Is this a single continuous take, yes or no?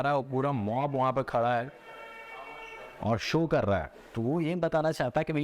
yes